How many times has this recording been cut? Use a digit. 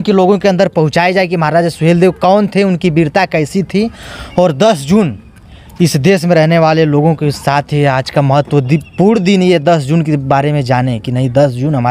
0